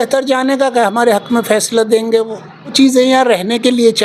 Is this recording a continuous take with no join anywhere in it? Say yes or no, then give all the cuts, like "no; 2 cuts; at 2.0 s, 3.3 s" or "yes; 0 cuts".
no; 1 cut; at 2.7 s